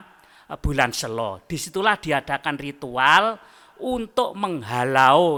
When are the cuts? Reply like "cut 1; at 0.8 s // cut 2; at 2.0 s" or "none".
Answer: none